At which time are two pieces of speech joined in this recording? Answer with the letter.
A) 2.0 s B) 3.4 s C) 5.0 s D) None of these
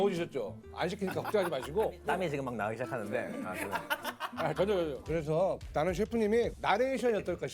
C